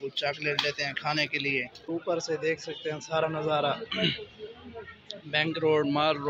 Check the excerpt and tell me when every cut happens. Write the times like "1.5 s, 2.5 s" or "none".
1.9 s